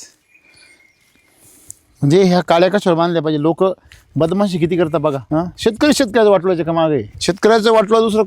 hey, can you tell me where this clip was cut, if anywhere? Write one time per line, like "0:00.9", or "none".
0:05.2
0:07.1